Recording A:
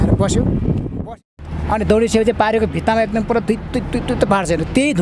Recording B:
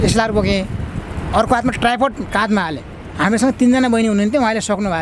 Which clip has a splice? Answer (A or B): A